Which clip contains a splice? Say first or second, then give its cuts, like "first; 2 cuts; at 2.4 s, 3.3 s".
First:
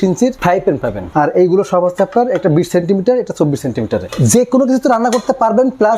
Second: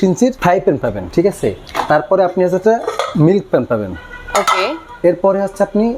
first; 2 cuts; at 1.0 s, 4.1 s